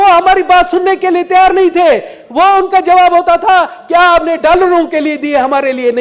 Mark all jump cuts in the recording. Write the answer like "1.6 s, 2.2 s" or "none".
none